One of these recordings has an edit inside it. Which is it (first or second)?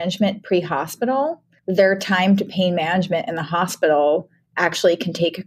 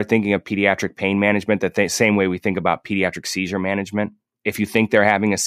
first